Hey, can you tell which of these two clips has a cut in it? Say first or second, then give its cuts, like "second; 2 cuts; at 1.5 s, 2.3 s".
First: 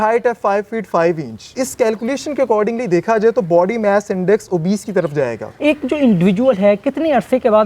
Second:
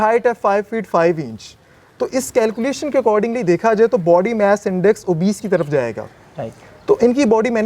first; 2 cuts; at 1.5 s, 5.4 s